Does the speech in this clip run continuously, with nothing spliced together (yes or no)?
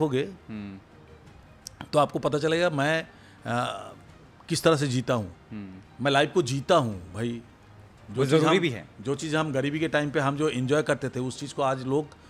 yes